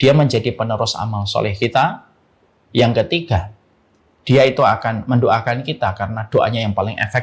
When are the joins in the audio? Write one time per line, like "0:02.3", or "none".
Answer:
none